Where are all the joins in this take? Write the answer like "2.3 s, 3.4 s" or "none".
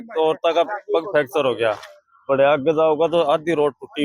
none